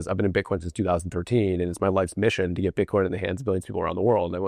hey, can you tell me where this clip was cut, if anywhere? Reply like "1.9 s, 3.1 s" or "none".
none